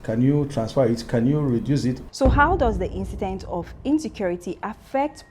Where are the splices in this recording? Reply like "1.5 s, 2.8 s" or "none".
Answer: 2.0 s